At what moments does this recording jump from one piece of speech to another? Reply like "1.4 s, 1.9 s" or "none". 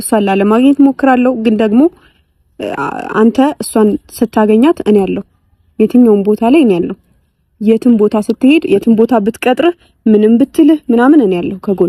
none